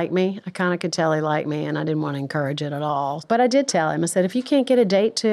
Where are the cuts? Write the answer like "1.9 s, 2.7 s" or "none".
3.2 s